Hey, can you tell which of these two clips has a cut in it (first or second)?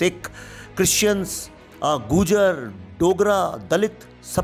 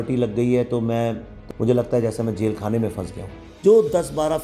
second